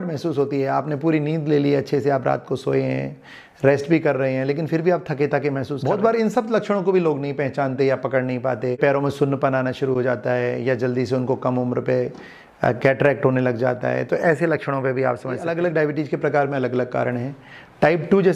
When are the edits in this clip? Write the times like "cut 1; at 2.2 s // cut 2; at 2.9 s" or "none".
cut 1; at 5.8 s // cut 2; at 8.8 s // cut 3; at 15.5 s